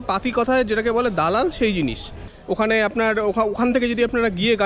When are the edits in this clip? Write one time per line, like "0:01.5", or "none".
0:02.3